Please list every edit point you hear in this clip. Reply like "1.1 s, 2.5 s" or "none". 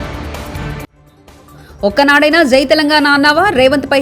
none

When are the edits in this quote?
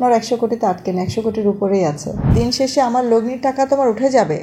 2.3 s

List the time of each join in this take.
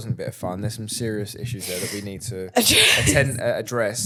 none

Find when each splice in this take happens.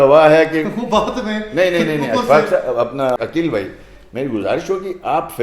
3.2 s

